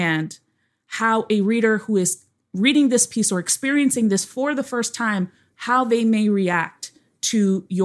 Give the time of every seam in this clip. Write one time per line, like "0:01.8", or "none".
none